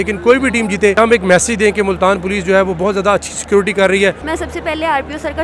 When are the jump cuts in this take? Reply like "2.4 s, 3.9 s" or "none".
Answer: 1.0 s, 4.2 s